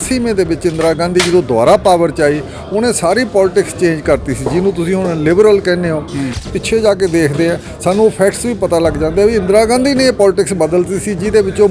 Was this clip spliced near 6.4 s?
yes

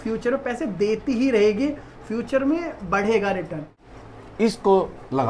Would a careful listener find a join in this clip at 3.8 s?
yes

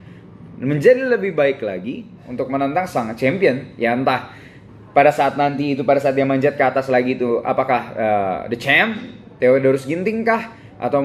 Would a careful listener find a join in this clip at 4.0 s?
no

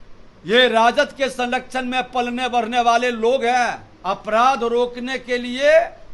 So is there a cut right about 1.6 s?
no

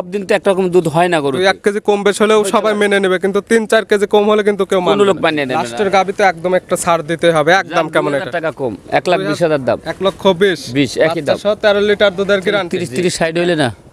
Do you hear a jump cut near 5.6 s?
yes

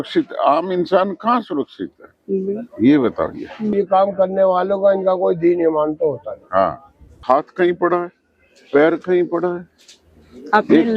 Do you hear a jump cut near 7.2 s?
yes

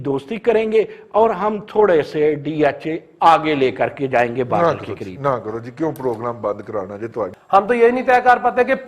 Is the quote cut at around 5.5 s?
no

